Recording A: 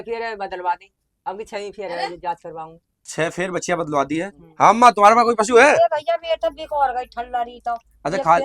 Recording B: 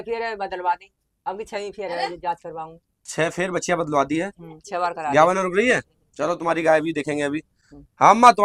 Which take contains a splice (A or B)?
A